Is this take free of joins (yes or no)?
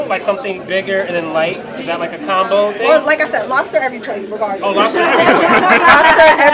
yes